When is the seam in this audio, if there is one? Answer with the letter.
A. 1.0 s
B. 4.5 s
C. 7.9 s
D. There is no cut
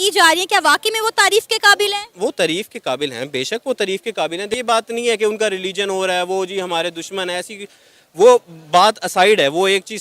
B